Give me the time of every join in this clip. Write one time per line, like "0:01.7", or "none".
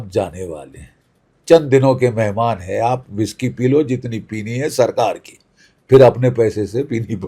none